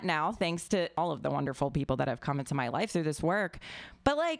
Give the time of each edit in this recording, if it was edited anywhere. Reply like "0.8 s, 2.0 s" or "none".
1.0 s